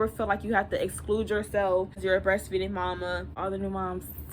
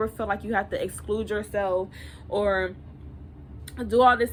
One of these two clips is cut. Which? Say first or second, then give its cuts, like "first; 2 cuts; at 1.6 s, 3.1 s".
first; 2 cuts; at 2.0 s, 3.4 s